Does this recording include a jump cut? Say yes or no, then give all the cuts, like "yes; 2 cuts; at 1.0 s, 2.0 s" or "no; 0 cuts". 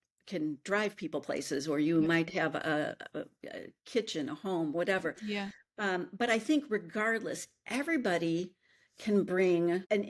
no; 0 cuts